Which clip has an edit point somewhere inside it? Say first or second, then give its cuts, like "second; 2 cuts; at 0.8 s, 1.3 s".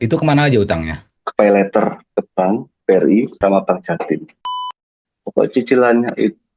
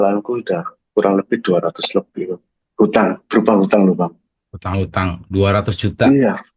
first; 3 cuts; at 2.7 s, 3.4 s, 4.6 s